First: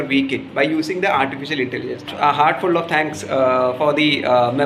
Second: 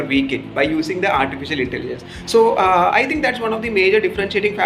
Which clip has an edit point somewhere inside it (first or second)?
first